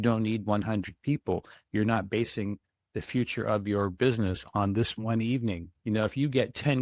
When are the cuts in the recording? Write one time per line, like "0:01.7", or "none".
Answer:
0:05.7